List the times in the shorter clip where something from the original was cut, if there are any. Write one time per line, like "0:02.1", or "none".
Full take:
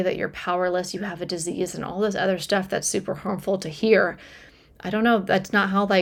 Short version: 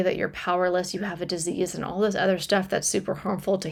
none